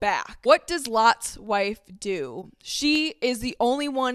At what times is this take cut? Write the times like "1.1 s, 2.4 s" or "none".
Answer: none